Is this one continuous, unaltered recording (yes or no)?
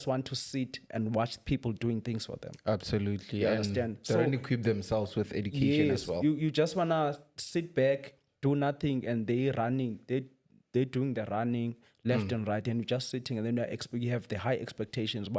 yes